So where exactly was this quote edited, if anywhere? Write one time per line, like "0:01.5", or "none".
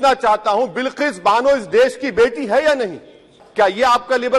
0:03.4